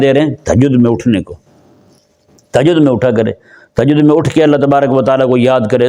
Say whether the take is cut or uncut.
uncut